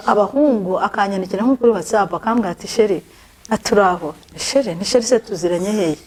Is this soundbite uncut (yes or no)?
yes